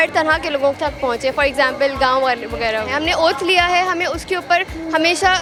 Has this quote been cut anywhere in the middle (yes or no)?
no